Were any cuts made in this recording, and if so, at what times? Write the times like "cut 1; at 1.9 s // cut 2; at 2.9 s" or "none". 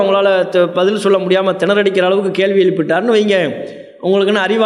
none